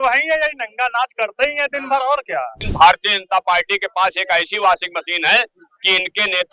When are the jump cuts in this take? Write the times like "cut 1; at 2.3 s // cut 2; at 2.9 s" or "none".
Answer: cut 1; at 2.6 s